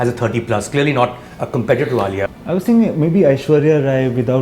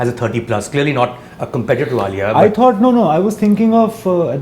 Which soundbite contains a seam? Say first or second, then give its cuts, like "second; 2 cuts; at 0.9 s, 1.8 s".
first; 1 cut; at 2.3 s